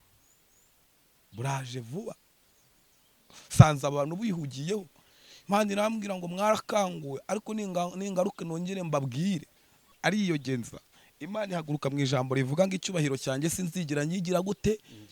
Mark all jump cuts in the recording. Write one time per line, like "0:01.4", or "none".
0:09.9